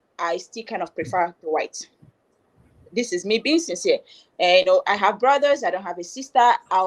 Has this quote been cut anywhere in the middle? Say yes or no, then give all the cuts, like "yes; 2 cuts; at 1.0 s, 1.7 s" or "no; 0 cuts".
no; 0 cuts